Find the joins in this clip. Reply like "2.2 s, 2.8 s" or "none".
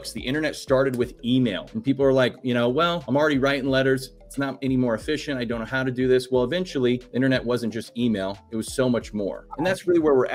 1.7 s, 3.0 s, 7.1 s, 9.4 s